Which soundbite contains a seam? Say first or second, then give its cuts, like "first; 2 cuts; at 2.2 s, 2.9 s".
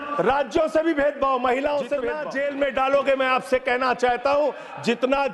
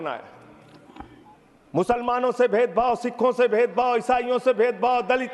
first; 1 cut; at 2.2 s